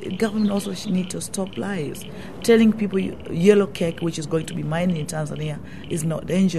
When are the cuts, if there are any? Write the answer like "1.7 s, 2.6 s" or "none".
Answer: none